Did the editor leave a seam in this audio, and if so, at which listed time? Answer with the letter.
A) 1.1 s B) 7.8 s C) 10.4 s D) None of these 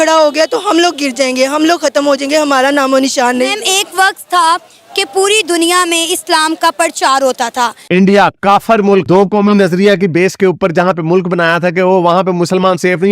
B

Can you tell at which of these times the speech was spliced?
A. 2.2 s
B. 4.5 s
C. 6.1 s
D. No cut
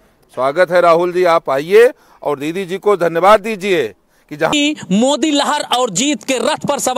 B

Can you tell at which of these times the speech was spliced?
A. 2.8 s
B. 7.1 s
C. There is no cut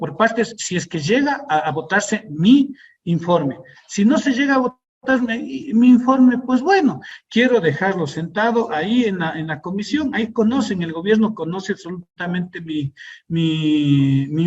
B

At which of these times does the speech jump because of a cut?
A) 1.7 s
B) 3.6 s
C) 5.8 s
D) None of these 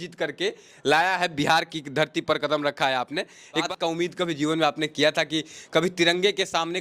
B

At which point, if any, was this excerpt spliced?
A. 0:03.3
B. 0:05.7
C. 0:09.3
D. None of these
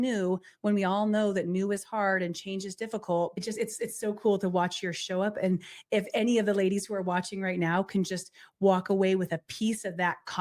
A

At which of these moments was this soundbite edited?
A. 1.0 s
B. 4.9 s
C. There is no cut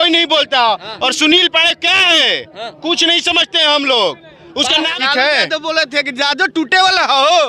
B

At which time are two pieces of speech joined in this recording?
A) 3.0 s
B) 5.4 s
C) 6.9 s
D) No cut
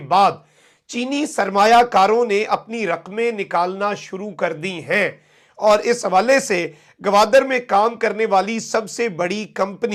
D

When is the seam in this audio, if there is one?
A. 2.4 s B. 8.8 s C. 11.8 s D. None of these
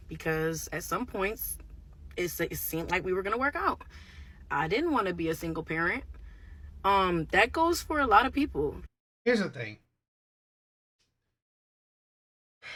D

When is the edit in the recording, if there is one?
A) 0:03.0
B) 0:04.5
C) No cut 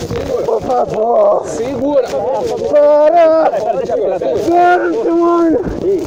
C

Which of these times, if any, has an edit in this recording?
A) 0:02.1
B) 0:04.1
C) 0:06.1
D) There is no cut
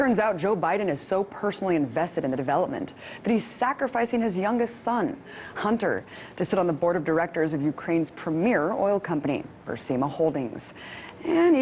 A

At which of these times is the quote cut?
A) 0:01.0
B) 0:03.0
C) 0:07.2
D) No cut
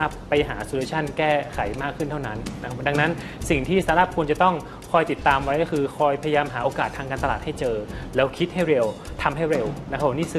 D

